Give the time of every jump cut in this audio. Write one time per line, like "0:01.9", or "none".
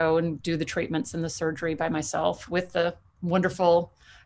none

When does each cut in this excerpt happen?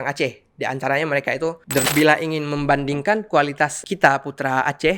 0:01.8

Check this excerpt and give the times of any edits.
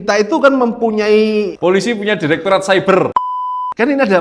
0:01.5
0:03.2

